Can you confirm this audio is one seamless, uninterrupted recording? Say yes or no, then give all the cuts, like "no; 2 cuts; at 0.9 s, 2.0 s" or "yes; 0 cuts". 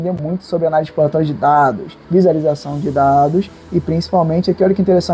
yes; 0 cuts